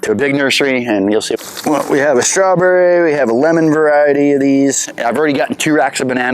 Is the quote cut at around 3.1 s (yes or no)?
no